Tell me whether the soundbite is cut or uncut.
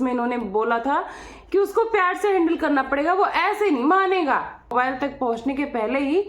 cut